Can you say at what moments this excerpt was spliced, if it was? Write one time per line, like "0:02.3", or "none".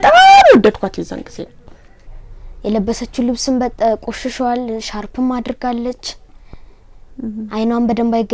0:02.1